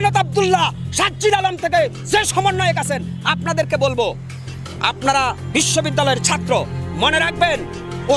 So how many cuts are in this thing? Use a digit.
0